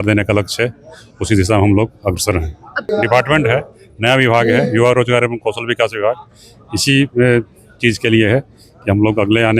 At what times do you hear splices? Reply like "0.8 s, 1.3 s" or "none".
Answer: 2.9 s